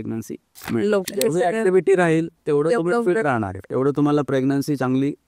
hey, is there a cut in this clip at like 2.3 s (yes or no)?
no